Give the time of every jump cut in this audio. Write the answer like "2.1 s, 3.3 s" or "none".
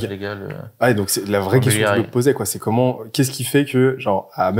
none